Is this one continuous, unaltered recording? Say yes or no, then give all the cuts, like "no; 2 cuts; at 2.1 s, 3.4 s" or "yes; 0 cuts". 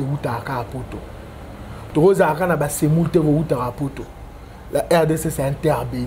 yes; 0 cuts